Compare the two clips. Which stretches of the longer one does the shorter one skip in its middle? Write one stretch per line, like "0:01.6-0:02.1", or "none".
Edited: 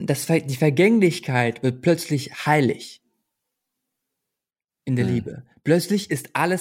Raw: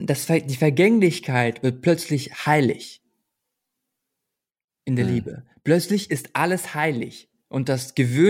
none